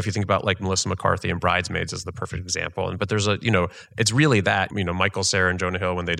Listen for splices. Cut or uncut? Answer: uncut